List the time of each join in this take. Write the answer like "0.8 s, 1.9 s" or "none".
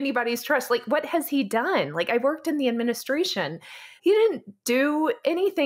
3.9 s